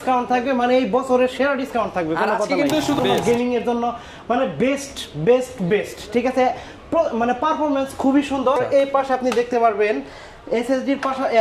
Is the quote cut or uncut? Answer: cut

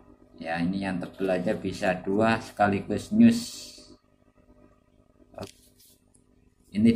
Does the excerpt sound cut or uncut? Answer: cut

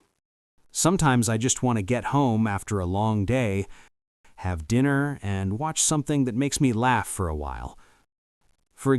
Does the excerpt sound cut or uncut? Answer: uncut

